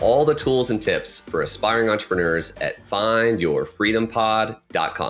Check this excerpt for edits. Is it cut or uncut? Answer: uncut